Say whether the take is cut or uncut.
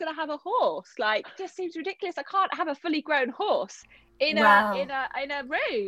cut